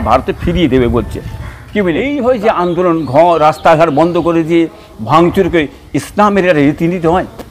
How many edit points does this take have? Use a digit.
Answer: 1